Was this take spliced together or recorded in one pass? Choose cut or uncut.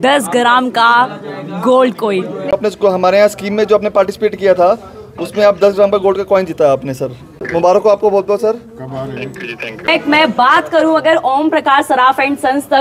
cut